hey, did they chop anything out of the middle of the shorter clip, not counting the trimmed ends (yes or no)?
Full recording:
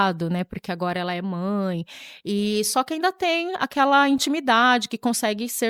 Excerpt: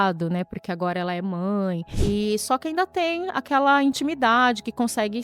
yes